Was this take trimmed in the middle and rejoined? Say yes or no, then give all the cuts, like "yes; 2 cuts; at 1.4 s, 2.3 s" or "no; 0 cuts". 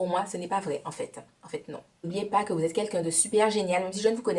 yes; 1 cut; at 2.1 s